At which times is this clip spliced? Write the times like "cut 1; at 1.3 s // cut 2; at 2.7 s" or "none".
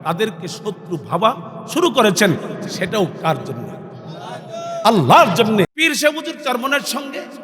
cut 1; at 5.7 s